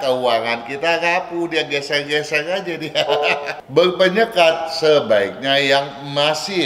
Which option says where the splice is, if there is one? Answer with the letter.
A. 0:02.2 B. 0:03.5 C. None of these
B